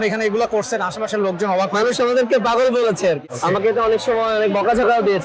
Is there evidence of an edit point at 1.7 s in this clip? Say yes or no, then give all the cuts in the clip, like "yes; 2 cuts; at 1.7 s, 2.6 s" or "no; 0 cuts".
no; 1 cut; at 3.2 s